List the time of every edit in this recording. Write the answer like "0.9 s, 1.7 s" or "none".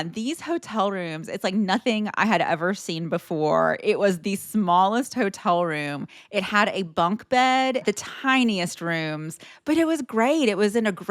7.8 s